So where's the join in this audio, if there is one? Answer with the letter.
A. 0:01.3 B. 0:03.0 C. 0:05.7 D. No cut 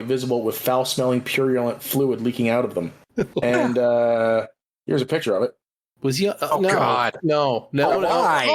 B